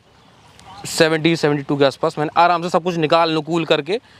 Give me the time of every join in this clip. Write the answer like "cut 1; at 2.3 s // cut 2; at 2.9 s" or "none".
none